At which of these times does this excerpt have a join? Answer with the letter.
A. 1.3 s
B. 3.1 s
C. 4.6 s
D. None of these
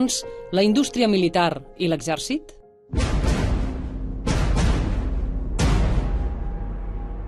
D